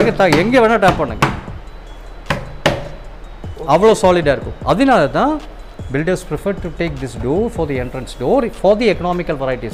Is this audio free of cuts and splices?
yes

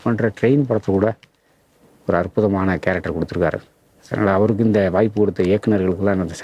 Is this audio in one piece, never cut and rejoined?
yes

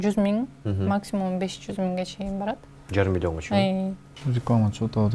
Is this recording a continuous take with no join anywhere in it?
no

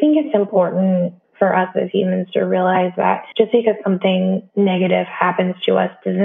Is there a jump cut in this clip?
yes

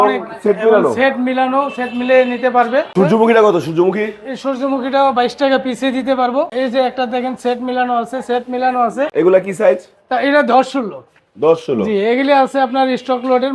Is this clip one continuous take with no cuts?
no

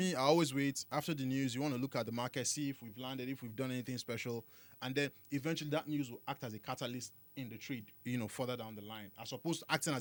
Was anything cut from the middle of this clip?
no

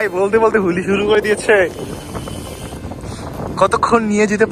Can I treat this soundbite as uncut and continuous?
yes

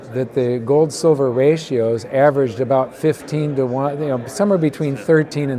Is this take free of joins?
yes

